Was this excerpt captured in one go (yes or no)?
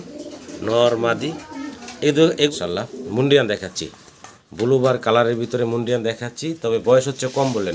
no